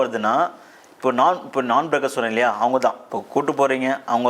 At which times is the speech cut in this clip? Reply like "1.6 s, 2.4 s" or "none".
3.1 s